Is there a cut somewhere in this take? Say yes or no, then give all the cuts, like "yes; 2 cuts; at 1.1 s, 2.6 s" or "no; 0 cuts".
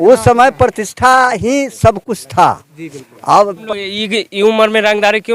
yes; 1 cut; at 3.6 s